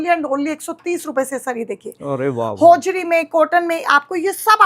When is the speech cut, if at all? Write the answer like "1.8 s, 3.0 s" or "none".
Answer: none